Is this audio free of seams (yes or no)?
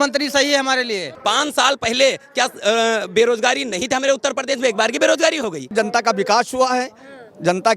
no